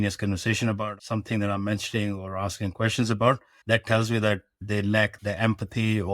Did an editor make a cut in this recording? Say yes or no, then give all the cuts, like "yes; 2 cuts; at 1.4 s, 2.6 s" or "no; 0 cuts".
yes; 3 cuts; at 0.9 s, 3.5 s, 5.1 s